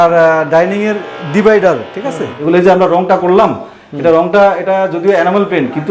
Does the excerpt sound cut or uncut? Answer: cut